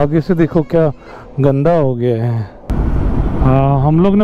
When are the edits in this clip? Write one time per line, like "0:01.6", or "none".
0:02.6